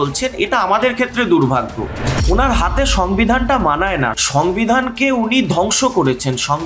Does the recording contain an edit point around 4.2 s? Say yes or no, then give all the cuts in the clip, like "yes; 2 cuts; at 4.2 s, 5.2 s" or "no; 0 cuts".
yes; 2 cuts; at 2.1 s, 4.2 s